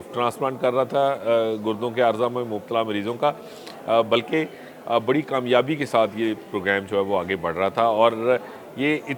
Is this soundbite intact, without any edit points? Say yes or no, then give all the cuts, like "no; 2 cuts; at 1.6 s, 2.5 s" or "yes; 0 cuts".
yes; 0 cuts